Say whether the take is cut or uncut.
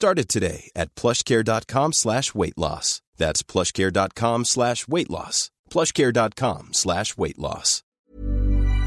cut